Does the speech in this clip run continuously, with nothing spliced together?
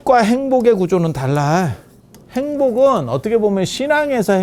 yes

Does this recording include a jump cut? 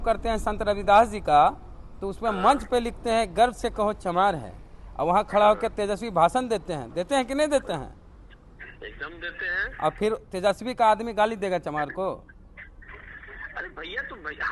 no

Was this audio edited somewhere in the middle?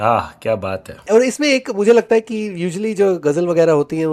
yes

